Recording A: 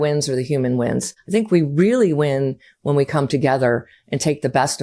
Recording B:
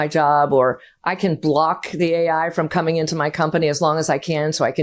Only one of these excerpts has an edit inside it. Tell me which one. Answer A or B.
A